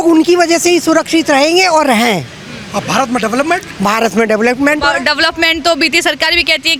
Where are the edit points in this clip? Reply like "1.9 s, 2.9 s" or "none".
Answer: none